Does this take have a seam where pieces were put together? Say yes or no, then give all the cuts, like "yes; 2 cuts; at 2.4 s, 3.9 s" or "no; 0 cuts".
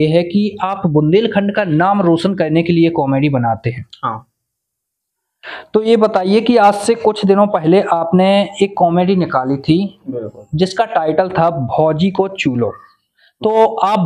no; 0 cuts